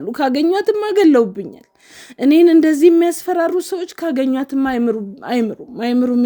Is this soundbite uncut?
yes; 0 cuts

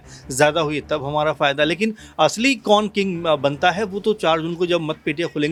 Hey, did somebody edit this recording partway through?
no; 0 cuts

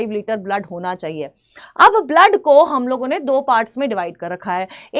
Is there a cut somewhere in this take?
no; 0 cuts

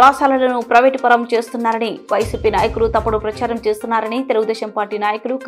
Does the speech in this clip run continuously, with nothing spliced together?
yes; 0 cuts

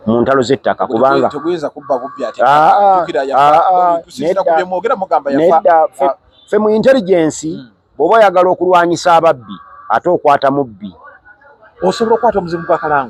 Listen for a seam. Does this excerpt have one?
no; 0 cuts

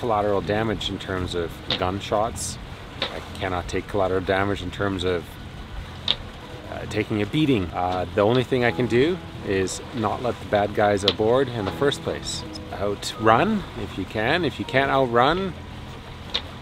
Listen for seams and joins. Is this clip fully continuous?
yes; 0 cuts

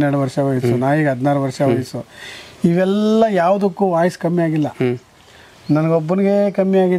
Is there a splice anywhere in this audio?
no; 0 cuts

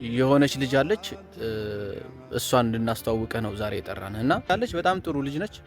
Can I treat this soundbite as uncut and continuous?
no; 1 cut; at 4.5 s

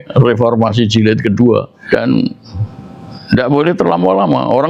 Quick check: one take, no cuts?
yes; 0 cuts

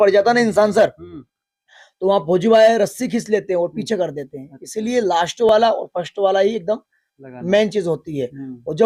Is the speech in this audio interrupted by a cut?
no; 0 cuts

